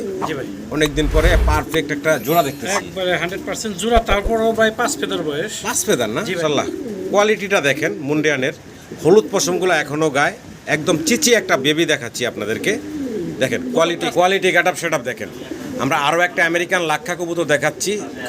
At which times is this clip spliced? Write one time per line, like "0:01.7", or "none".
0:06.4
0:14.1